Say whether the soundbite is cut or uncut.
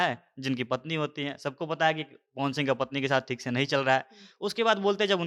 uncut